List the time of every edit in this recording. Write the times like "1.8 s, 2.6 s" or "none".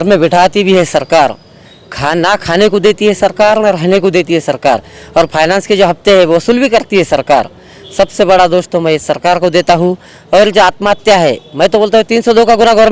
none